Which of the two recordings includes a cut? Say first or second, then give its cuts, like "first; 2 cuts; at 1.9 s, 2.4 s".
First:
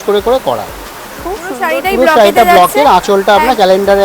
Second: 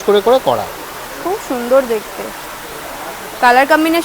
first; 1 cut; at 1.6 s